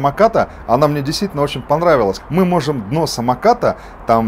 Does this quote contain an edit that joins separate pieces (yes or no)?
yes